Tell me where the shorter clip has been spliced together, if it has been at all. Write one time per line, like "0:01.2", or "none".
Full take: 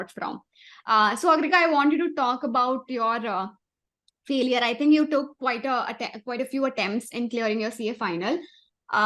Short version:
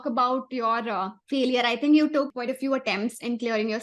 0:01.2
0:02.3